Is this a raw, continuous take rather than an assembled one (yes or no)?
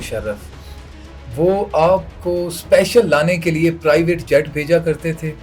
yes